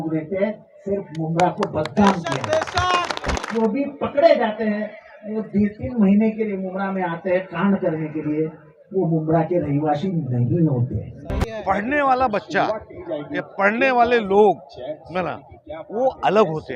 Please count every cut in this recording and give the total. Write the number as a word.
two